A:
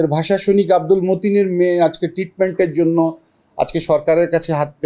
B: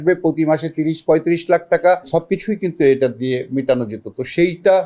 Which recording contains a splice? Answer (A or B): B